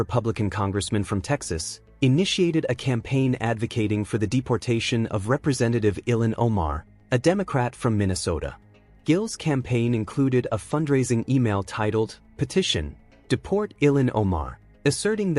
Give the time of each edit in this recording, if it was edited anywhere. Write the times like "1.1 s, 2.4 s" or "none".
none